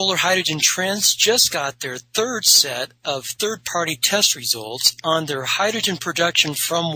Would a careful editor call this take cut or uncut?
uncut